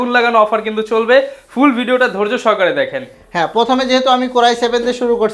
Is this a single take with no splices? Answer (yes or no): yes